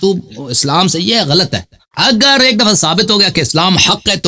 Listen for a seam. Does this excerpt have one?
yes; 1 cut; at 1.7 s

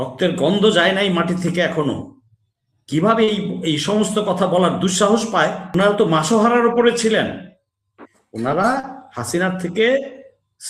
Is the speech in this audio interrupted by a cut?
yes; 1 cut; at 5.6 s

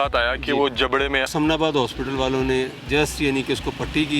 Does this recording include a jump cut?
yes; 1 cut; at 1.3 s

